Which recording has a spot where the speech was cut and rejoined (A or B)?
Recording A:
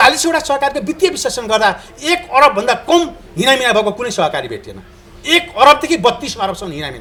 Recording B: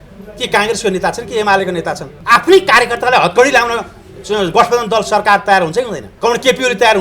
B